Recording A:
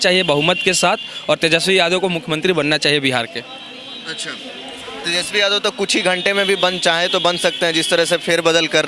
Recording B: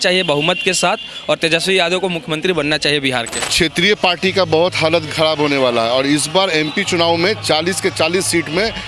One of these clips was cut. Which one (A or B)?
B